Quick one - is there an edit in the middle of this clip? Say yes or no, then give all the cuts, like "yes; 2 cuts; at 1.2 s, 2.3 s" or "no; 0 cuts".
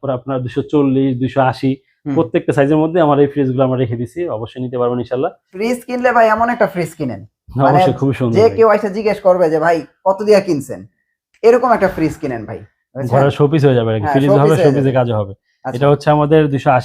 yes; 1 cut; at 5.5 s